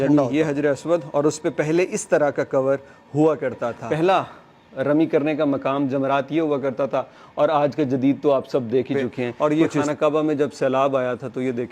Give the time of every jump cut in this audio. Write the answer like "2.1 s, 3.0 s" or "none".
3.7 s, 9.3 s